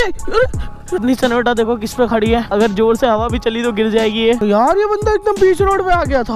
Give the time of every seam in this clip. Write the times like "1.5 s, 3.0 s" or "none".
0.9 s, 2.4 s, 4.4 s